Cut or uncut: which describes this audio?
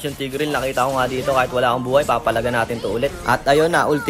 uncut